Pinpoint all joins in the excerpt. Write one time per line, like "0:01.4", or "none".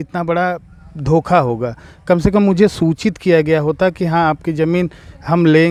none